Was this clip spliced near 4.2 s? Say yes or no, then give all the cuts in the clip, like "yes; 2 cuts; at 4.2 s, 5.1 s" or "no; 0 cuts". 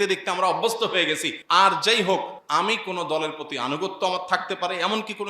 no; 2 cuts; at 1.3 s, 2.4 s